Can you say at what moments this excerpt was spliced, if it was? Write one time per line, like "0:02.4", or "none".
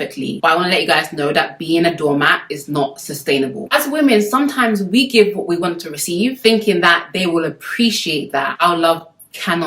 0:03.6
0:08.6